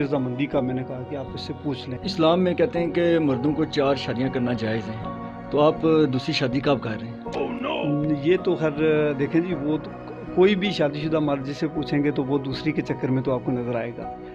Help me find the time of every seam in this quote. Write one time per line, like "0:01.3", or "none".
0:02.0